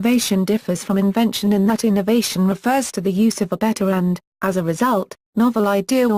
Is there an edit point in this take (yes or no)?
yes